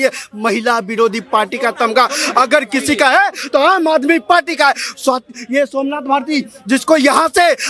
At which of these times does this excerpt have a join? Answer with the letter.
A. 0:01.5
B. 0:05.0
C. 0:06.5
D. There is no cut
D